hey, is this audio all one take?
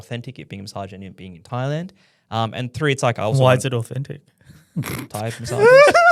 yes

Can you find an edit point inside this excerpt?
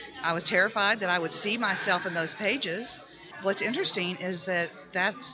no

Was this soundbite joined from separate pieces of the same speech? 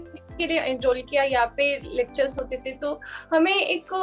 yes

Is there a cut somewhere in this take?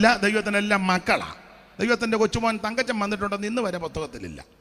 no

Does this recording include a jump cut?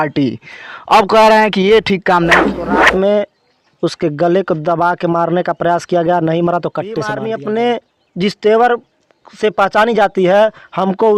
yes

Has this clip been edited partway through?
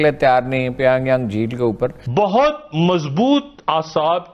yes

